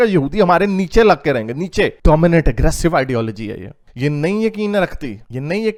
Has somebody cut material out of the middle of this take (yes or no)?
no